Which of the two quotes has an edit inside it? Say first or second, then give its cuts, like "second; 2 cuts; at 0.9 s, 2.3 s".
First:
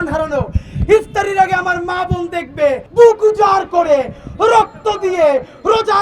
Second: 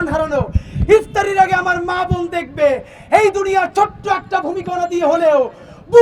first; 1 cut; at 2.8 s